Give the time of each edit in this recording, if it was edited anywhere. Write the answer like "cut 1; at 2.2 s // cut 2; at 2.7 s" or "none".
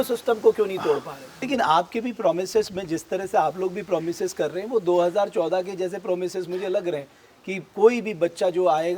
cut 1; at 1.4 s